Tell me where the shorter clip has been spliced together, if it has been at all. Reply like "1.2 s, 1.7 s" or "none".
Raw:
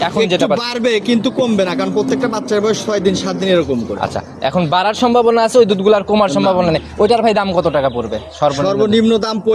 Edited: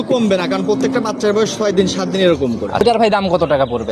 2.8 s